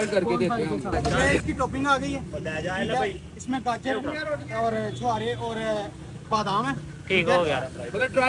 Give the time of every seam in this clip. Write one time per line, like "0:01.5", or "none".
0:01.4